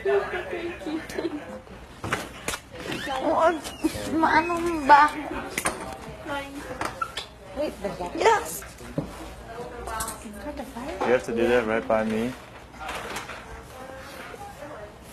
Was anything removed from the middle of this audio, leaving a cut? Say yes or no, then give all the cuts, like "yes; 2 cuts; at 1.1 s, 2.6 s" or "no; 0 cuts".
no; 0 cuts